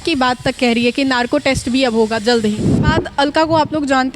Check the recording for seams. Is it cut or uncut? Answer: cut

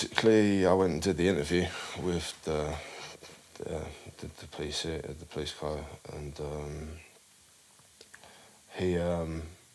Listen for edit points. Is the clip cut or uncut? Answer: uncut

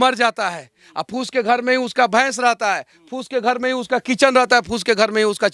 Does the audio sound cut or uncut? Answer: uncut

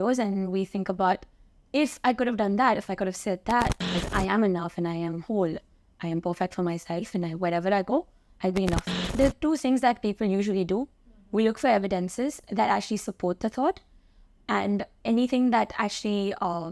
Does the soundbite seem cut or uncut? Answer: cut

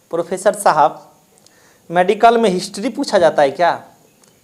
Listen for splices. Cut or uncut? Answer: uncut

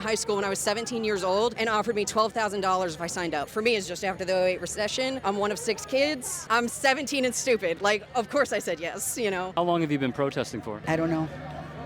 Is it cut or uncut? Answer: cut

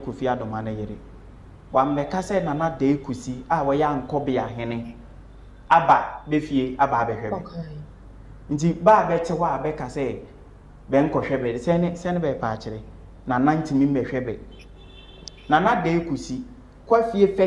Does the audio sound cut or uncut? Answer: uncut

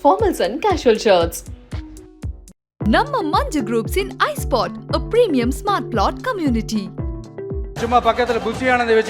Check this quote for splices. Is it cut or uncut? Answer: cut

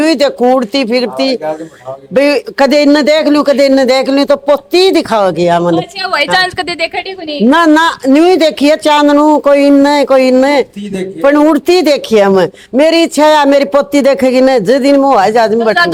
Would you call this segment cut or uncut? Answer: uncut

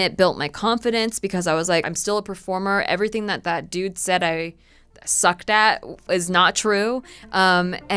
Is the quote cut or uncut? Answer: cut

